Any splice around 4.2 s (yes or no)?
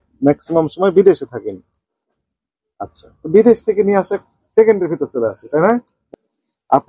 no